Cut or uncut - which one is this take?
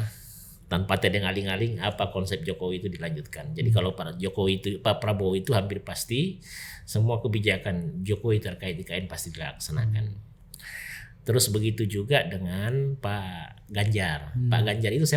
uncut